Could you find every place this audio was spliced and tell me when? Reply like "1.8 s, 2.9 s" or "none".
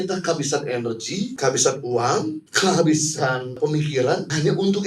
1.3 s, 2.4 s, 3.9 s